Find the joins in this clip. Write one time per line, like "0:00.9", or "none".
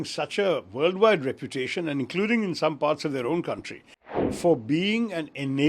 0:04.2

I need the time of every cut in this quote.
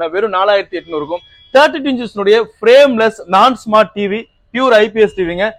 none

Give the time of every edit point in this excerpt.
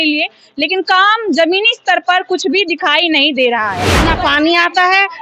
0:04.1

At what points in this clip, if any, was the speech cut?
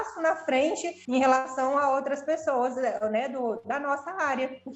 0:01.0

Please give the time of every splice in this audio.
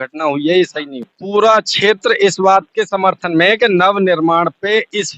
0:01.2

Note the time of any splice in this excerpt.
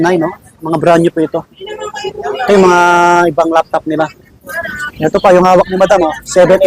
0:04.3

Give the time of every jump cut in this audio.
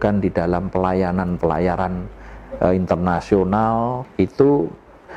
0:04.0

